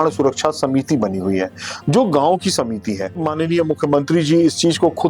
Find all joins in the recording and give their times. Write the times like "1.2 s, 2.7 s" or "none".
3.2 s